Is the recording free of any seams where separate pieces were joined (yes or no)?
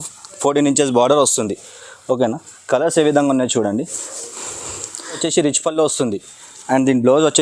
no